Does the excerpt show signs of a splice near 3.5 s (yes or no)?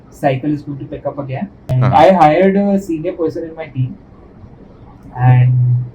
no